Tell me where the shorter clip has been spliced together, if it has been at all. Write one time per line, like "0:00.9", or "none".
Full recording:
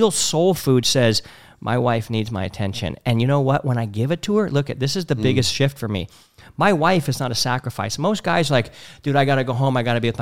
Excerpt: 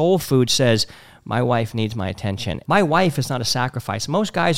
0:02.5